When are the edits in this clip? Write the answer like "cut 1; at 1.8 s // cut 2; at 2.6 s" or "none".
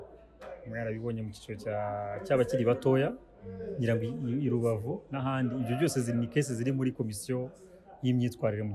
none